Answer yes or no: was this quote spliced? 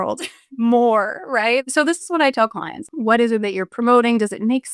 yes